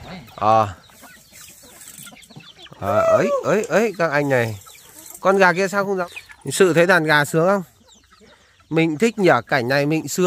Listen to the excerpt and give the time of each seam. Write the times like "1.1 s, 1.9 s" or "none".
6.0 s